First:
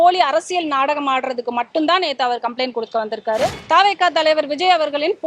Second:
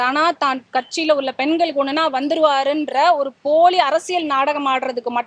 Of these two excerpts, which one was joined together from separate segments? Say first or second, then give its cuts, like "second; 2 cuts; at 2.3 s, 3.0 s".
first; 1 cut; at 3.6 s